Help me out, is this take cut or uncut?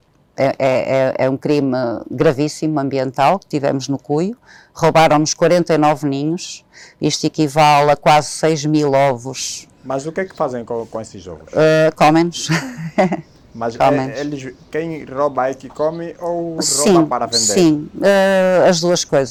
uncut